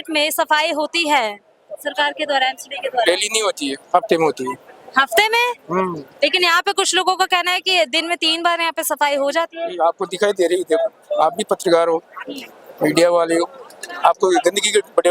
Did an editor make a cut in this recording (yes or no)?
no